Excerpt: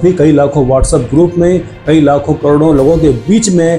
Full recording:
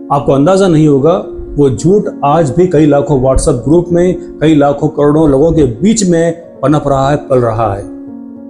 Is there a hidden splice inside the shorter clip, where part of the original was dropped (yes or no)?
no